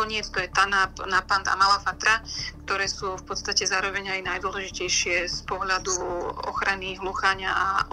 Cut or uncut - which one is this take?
uncut